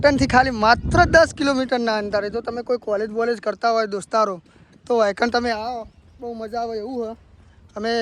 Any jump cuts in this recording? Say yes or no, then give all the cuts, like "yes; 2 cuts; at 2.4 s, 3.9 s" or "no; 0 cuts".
no; 0 cuts